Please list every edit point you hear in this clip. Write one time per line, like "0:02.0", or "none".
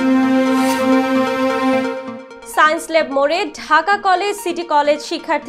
0:01.9